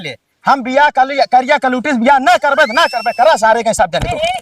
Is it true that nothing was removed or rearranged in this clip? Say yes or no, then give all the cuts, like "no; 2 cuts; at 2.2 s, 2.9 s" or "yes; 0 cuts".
yes; 0 cuts